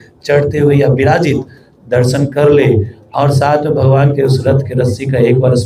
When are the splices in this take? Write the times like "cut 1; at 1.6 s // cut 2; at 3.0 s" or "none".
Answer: none